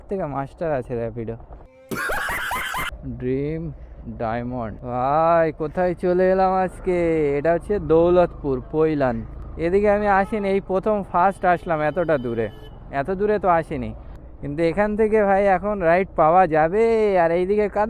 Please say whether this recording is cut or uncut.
cut